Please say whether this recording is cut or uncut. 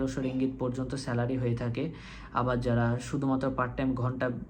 uncut